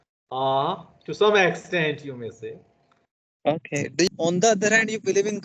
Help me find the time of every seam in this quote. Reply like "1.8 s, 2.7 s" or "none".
4.1 s